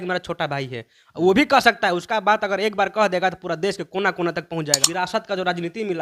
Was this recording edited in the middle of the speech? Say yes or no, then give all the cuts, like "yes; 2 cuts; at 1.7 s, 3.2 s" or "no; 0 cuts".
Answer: yes; 1 cut; at 4.8 s